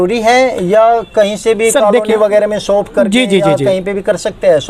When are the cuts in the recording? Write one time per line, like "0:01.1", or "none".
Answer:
none

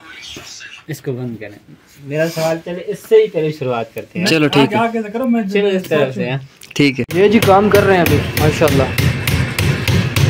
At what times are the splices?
0:07.0

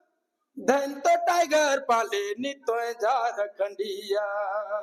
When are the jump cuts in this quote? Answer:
none

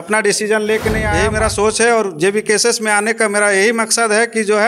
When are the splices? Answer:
0:01.3

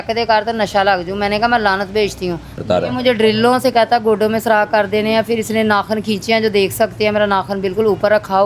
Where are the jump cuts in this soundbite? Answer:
0:02.6

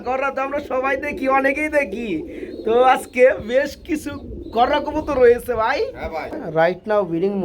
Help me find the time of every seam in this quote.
0:06.4

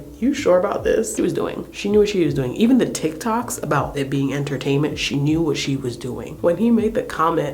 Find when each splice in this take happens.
0:01.1
0:06.4

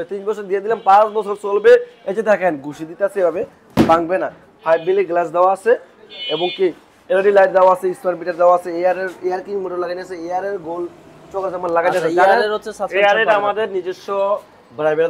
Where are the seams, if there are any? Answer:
none

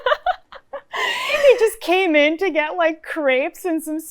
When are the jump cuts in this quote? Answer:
none

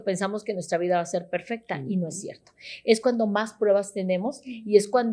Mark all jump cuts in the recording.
none

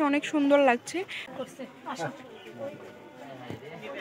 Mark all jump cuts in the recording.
0:01.2

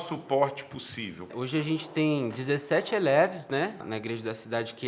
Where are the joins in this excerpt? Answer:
0:01.3
0:03.8

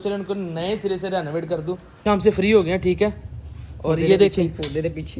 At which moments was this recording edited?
0:01.9

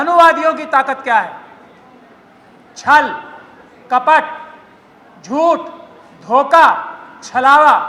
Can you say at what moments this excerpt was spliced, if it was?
none

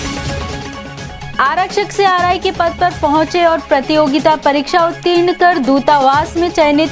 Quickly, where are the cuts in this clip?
none

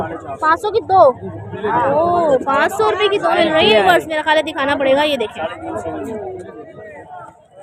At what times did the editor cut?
none

